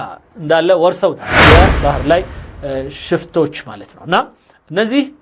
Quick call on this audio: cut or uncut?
cut